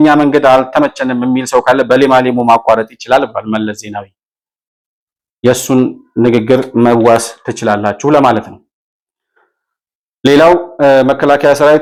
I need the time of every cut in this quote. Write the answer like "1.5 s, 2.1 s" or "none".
none